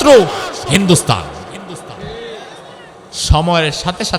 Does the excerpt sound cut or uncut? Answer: cut